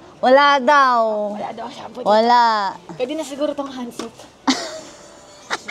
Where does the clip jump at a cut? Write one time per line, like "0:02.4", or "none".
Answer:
none